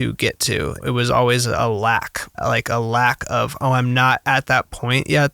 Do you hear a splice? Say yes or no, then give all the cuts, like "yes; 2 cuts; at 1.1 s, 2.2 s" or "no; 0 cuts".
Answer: yes; 2 cuts; at 0.8 s, 2.4 s